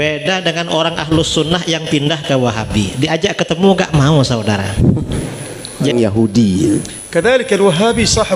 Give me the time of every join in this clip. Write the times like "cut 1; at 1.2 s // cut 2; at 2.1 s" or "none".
cut 1; at 5.9 s